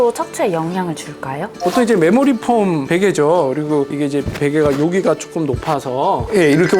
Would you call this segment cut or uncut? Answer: cut